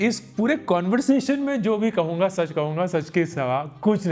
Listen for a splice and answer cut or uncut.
uncut